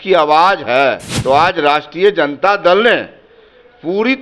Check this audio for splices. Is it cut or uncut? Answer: cut